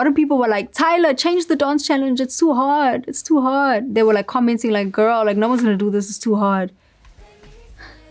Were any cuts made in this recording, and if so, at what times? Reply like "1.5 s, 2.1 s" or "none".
none